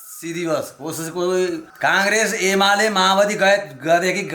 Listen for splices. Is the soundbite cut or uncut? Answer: cut